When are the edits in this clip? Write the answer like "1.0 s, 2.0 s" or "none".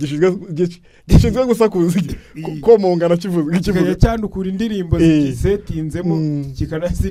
none